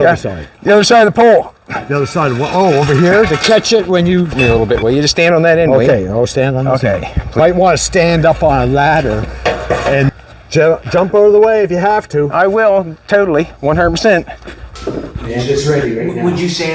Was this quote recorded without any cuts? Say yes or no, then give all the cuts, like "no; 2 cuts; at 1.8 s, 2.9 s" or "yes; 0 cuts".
no; 4 cuts; at 4.4 s, 7.3 s, 10.1 s, 15.1 s